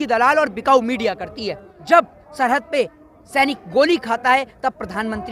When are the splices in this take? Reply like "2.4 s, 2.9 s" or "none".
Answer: 1.7 s